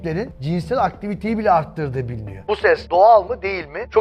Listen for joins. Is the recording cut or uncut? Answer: cut